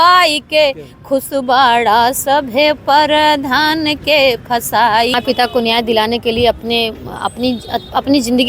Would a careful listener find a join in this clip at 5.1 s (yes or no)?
yes